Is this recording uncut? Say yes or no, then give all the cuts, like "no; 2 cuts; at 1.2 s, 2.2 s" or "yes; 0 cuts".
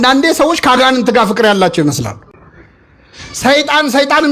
yes; 0 cuts